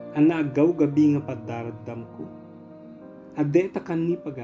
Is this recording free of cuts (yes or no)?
yes